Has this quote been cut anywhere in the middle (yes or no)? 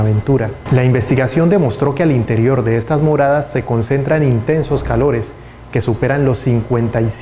no